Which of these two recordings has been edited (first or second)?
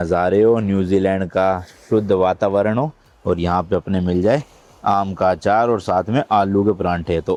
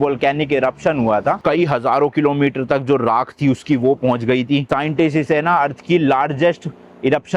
second